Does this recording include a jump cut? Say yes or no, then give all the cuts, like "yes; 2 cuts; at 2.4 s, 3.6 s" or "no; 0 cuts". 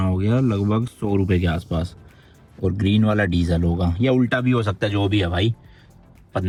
no; 0 cuts